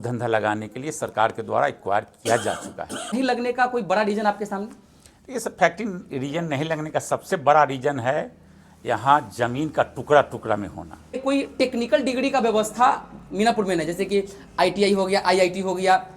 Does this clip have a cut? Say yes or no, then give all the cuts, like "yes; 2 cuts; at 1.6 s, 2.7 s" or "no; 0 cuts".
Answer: yes; 2 cuts; at 3.1 s, 11.2 s